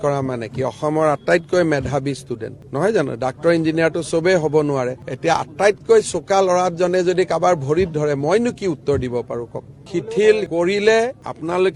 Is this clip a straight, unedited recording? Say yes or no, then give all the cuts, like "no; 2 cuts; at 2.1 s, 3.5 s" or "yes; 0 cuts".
no; 1 cut; at 9.8 s